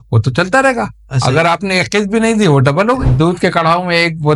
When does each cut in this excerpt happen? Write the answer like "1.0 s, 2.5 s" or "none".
3.1 s